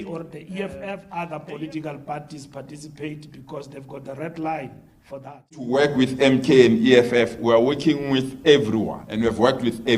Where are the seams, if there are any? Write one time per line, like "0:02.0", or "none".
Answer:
0:01.0
0:05.7
0:09.0